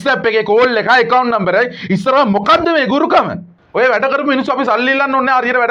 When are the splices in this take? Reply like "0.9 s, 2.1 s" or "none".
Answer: 3.6 s